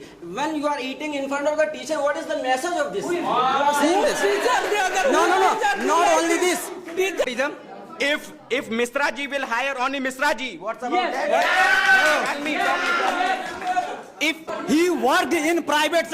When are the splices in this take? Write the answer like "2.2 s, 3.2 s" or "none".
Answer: 7.3 s, 14.5 s